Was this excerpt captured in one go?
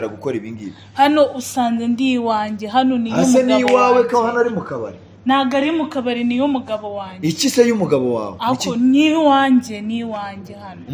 yes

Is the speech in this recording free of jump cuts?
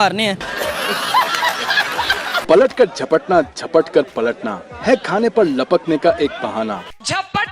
no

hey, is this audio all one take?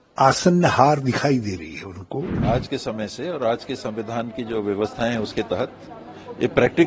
no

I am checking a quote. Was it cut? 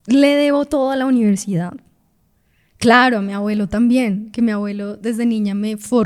no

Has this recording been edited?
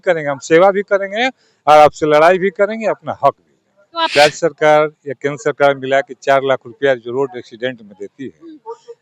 yes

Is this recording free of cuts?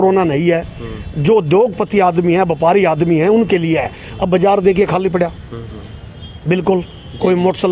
yes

